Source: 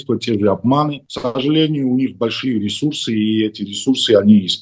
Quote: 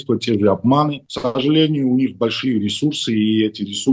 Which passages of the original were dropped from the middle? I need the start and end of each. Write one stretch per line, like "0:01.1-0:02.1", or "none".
none